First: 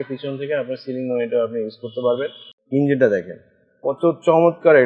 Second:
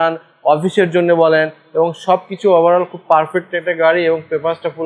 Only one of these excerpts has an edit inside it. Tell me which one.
first; 1 cut; at 2.4 s

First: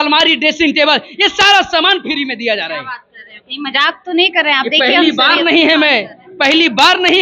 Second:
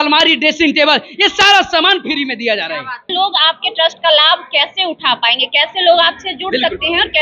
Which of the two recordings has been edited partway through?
second; 1 cut; at 3.1 s

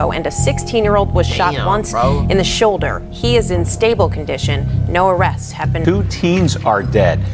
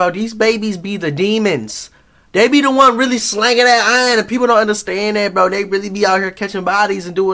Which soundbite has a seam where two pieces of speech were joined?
first; 1 cut; at 5.8 s

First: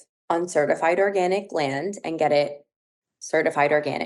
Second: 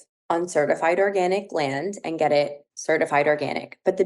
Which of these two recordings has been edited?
second; 1 cut; at 2.7 s

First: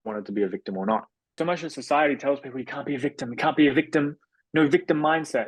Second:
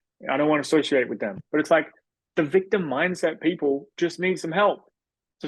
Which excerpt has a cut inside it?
first; 1 cut; at 1.2 s

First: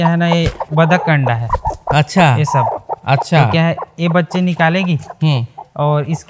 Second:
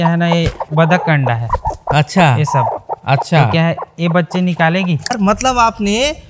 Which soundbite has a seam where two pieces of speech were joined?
second; 1 cut; at 5.1 s

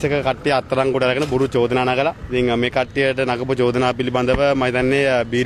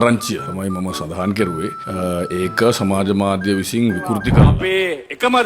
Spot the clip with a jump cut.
second; 1 cut; at 4.3 s

